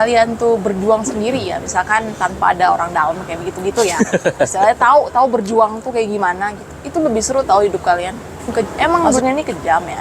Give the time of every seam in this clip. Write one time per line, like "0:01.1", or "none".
0:08.5